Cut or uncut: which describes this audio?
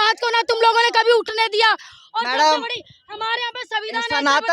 uncut